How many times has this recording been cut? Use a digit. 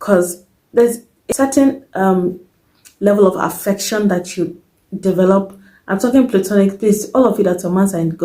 1